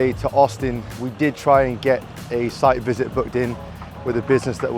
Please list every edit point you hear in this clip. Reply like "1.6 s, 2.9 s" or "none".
1.0 s